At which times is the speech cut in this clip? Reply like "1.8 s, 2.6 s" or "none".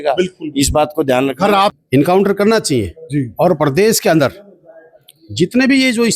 1.7 s